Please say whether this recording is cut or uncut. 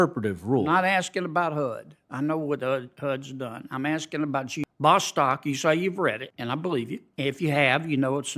cut